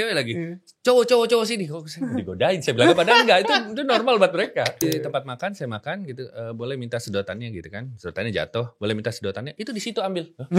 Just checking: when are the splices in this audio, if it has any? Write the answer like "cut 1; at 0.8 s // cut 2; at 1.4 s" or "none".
cut 1; at 4.8 s